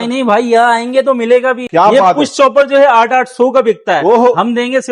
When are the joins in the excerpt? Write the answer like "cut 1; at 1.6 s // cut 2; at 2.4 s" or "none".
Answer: cut 1; at 1.6 s

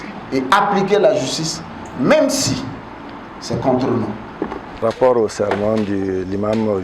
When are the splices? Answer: cut 1; at 4.8 s

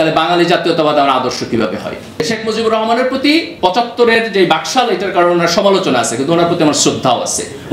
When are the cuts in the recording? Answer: cut 1; at 2.2 s

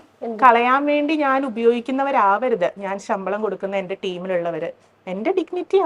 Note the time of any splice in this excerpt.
none

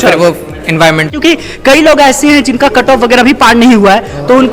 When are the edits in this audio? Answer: cut 1; at 1.1 s

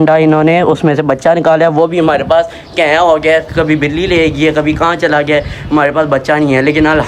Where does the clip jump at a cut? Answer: none

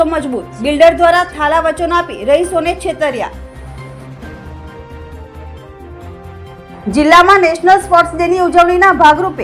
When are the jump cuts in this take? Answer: none

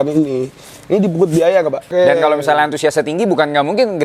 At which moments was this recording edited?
cut 1; at 1.9 s

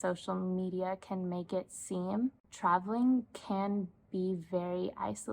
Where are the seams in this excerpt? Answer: cut 1; at 2.5 s

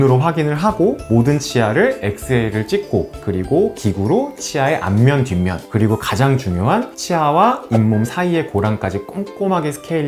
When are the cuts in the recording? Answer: none

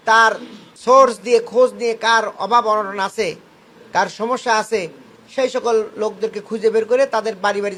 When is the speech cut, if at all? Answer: none

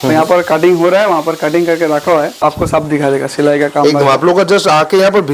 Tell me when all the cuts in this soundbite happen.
cut 1; at 2.4 s

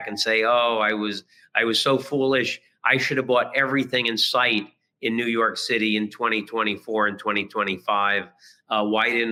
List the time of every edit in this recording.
none

